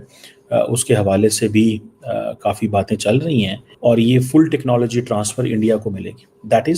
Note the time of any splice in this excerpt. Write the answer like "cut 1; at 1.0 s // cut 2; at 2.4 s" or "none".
cut 1; at 3.7 s

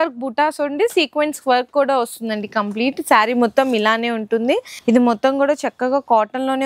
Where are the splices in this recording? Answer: cut 1; at 4.6 s

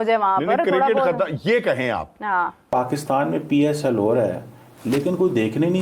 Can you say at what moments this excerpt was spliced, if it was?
cut 1; at 2.6 s

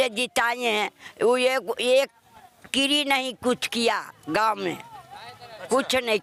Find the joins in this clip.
none

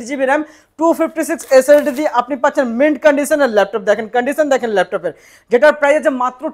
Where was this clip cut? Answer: none

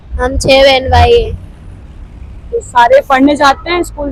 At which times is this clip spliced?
none

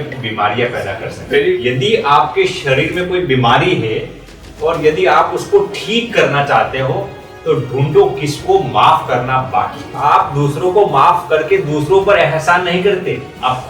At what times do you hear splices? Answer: cut 1; at 1.6 s // cut 2; at 9.9 s

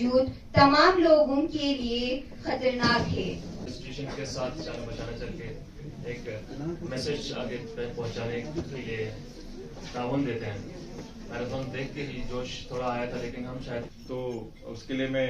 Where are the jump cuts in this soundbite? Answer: cut 1; at 3.6 s // cut 2; at 14.0 s

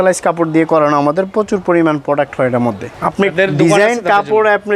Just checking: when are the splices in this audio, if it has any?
cut 1; at 2.9 s

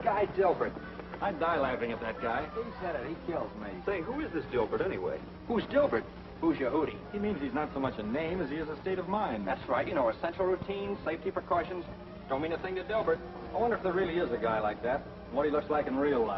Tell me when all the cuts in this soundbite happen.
cut 1; at 2.8 s

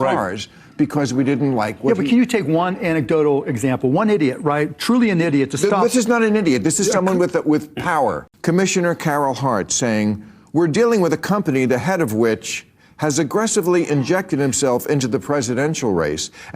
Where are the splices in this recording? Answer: cut 1; at 8.3 s

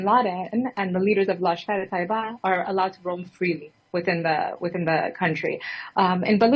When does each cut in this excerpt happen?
none

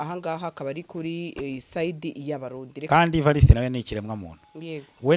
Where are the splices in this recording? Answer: cut 1; at 2.9 s

